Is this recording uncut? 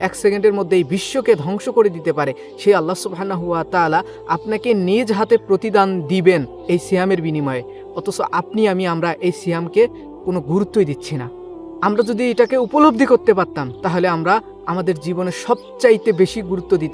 yes; 0 cuts

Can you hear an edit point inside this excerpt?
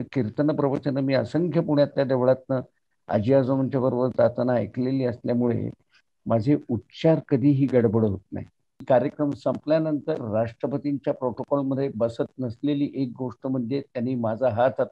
yes; 1 cut; at 8.8 s

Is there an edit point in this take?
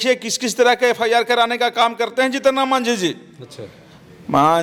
no; 0 cuts

